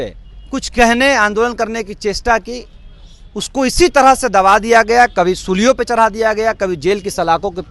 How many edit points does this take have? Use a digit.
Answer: 0